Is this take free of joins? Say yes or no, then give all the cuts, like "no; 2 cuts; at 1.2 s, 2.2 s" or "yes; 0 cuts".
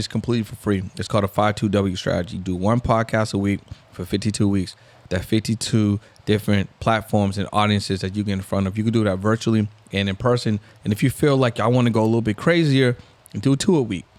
yes; 0 cuts